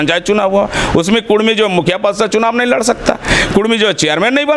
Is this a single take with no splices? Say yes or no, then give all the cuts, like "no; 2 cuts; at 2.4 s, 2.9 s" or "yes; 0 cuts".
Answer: yes; 0 cuts